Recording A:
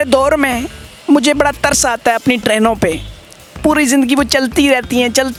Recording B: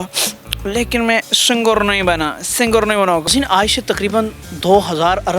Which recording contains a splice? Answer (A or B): B